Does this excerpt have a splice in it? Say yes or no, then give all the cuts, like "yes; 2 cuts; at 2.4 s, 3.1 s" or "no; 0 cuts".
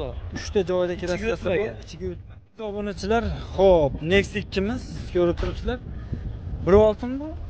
yes; 1 cut; at 2.8 s